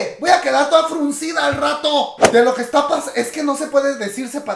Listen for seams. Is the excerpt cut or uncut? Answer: cut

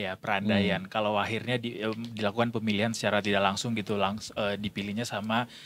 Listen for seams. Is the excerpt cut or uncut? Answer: uncut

